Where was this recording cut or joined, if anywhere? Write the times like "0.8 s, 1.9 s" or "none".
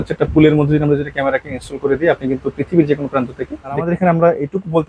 3.8 s